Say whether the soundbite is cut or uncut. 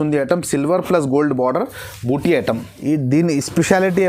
cut